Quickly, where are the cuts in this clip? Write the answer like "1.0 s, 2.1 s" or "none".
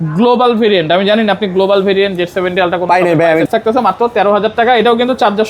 3.5 s

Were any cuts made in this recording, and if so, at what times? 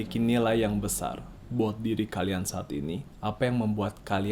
1.3 s, 3.1 s

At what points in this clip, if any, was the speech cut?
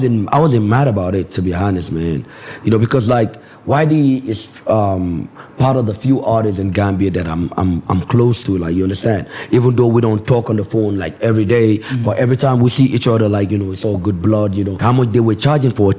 14.8 s

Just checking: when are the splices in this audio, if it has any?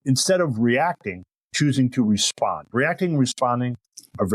none

